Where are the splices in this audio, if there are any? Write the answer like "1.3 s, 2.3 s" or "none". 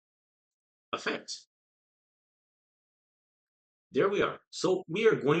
none